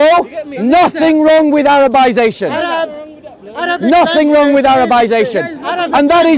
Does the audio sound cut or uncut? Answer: uncut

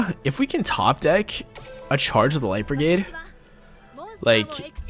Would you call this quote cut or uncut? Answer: uncut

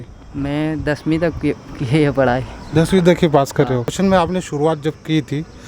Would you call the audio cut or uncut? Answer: cut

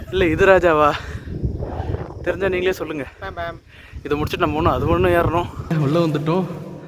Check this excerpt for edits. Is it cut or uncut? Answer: cut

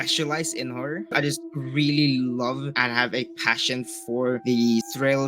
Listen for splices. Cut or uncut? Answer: cut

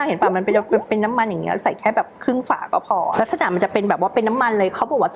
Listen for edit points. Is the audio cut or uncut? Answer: cut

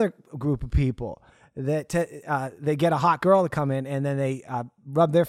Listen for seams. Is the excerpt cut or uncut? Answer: uncut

